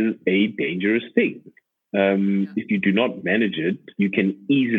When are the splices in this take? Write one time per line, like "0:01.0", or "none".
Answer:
0:03.9